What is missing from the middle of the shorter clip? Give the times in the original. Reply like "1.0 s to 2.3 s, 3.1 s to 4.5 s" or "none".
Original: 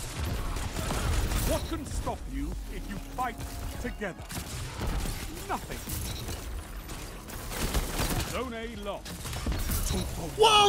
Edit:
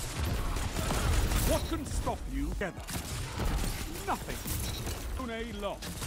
2.6 s to 4.0 s, 6.6 s to 8.4 s

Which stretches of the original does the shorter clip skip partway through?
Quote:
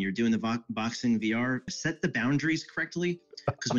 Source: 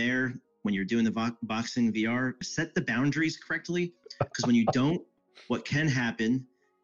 none

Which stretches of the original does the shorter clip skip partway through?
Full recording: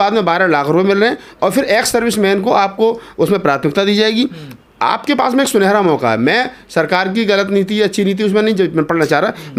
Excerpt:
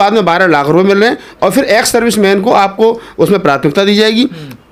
none

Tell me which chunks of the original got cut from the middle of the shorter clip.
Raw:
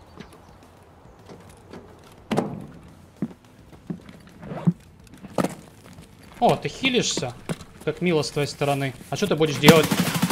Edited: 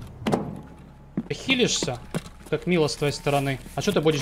3.3 s to 6.6 s

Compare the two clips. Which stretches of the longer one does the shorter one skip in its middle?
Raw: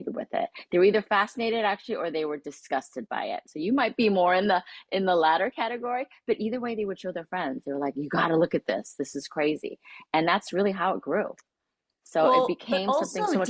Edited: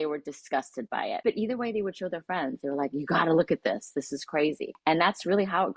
3.3 s to 6.2 s, 9.7 s to 10.0 s

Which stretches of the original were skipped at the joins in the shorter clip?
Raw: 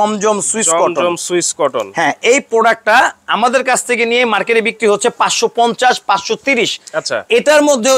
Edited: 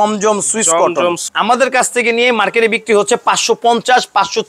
1.2 s to 3.2 s

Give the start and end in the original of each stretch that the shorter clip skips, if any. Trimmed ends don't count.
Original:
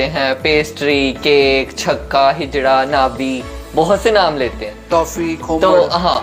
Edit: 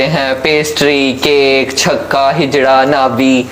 none

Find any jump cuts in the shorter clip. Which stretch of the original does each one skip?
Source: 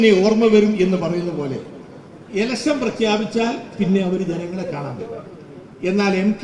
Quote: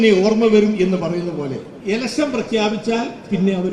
1.7 s to 2.2 s

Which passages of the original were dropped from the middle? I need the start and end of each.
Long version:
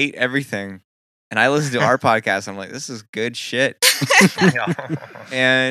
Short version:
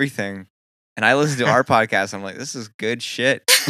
none

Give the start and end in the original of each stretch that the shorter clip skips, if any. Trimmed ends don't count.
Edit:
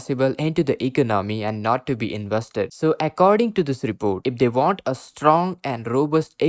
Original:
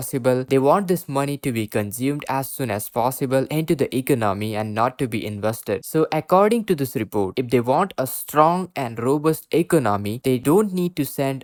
none

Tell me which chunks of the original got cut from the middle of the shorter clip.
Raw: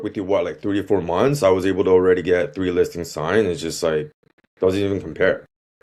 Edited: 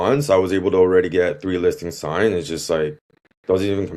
none

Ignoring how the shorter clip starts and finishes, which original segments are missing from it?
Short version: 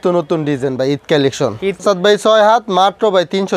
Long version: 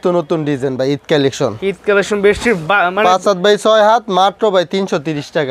1.8 s to 3.2 s

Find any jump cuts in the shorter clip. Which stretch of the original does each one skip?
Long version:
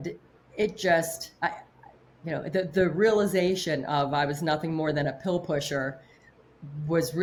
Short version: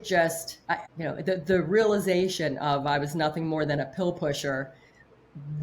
1.6 s to 2.2 s

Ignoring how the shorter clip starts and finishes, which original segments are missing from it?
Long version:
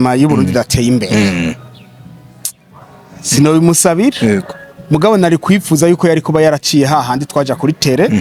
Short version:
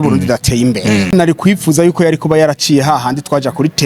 1.4 s to 5.2 s

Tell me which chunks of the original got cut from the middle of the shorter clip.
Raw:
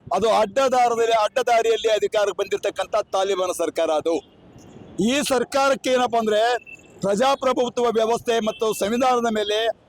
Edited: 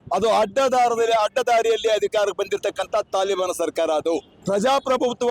4.3 s to 6.9 s

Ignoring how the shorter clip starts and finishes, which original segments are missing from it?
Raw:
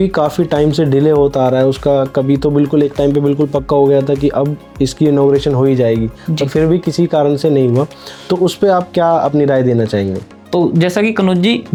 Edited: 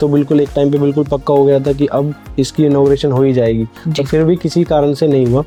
none

